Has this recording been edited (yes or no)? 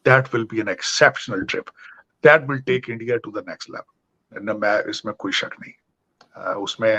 no